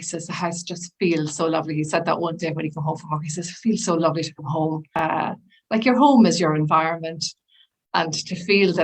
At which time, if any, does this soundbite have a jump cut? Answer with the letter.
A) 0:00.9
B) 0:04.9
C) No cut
B